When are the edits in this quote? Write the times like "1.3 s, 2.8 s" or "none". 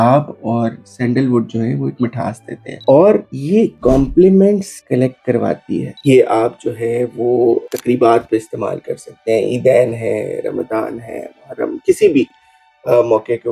2.8 s, 5.9 s